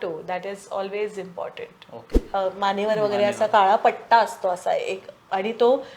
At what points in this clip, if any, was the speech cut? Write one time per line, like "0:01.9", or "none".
0:02.3